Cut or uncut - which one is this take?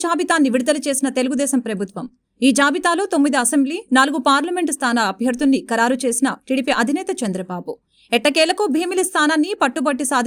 uncut